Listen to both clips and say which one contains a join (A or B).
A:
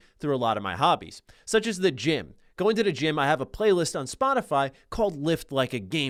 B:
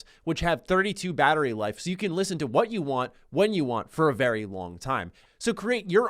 B